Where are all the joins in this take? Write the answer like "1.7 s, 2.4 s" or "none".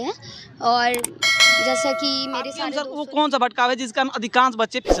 2.6 s